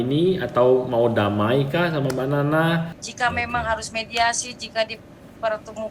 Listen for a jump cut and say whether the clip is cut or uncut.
cut